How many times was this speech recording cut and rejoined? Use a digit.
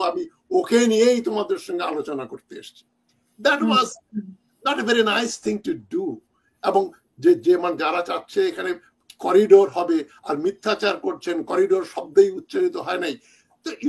0